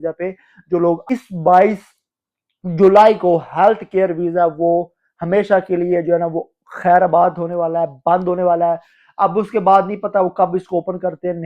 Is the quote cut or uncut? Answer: cut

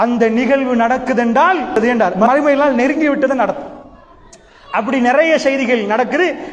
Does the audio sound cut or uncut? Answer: cut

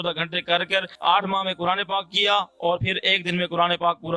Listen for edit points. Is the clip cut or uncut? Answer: cut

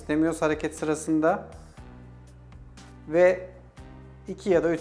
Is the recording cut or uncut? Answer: uncut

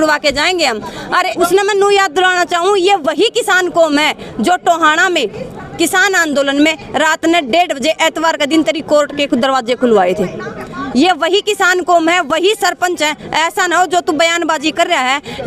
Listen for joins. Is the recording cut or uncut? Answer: cut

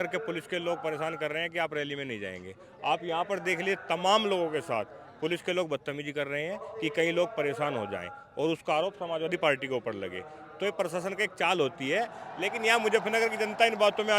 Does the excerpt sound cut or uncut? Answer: uncut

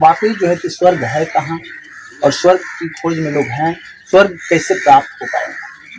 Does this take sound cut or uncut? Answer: uncut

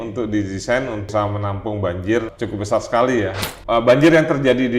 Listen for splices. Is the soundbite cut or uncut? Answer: cut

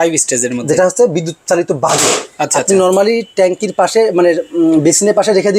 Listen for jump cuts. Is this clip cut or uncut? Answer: uncut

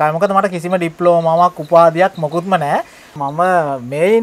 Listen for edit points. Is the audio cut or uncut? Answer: cut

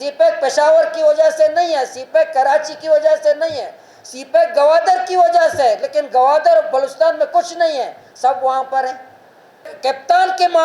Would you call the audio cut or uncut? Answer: cut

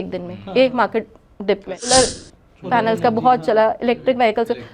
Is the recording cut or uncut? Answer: cut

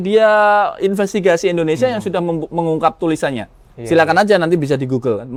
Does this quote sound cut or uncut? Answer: uncut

